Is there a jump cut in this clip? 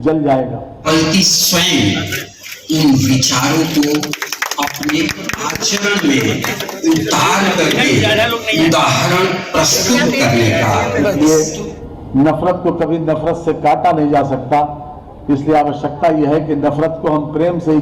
yes; 2 cuts; at 0.8 s, 11.1 s

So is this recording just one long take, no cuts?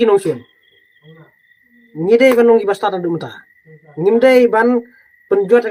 yes; 0 cuts

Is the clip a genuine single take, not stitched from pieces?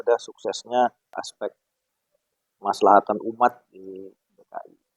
no; 1 cut; at 1.2 s

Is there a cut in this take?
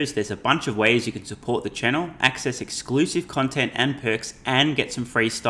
no; 0 cuts

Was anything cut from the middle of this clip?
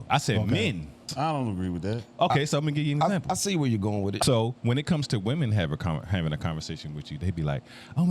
yes; 2 cuts; at 1.0 s, 4.1 s

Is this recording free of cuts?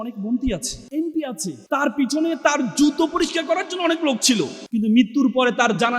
no; 2 cuts; at 1.2 s, 4.6 s

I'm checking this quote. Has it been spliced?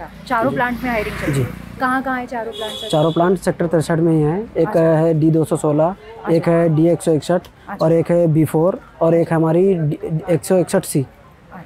no; 0 cuts

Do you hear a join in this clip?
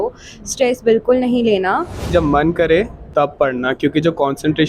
yes; 1 cut; at 2.1 s

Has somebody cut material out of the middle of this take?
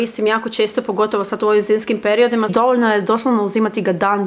yes; 1 cut; at 2.5 s

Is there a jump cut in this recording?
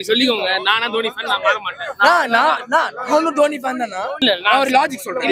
yes; 1 cut; at 4.1 s

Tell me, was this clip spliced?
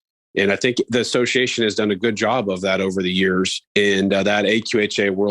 yes; 1 cut; at 3.6 s

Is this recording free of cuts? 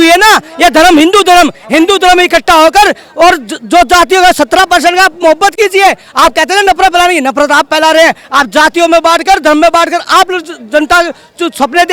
yes; 0 cuts

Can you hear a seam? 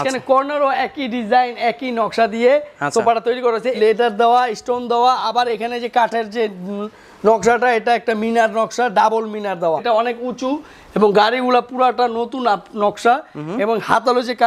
yes; 2 cuts; at 3.7 s, 9.8 s

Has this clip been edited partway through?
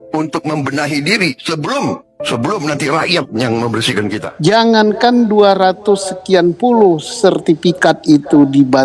yes; 1 cut; at 4.2 s

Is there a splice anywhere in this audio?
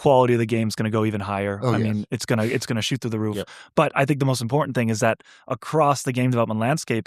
no; 0 cuts

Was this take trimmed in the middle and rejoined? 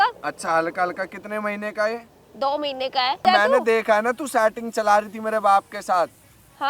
yes; 1 cut; at 3.2 s

